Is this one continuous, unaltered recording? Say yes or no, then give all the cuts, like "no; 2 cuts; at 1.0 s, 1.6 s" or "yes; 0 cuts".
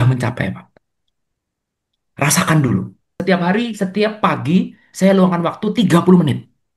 no; 1 cut; at 3.1 s